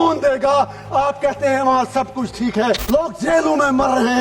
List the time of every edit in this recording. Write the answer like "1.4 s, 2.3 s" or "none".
2.8 s